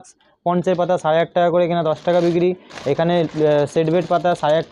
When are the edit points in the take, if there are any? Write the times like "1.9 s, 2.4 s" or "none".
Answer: none